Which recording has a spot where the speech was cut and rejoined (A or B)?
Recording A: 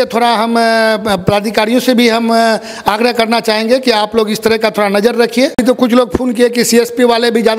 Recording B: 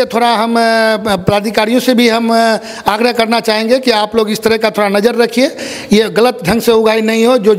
A